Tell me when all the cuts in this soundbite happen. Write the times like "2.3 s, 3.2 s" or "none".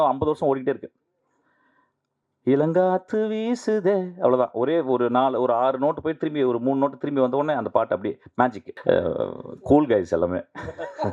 8.7 s